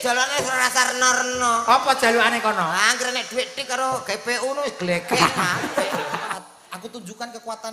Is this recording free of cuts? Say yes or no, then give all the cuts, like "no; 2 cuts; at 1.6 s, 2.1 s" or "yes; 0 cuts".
no; 1 cut; at 6.3 s